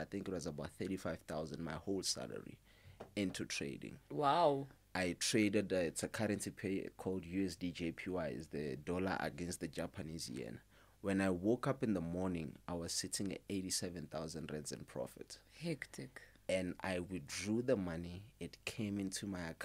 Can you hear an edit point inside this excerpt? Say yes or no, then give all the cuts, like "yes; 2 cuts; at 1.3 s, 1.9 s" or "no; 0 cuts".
no; 0 cuts